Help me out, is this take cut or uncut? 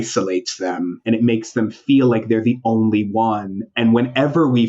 cut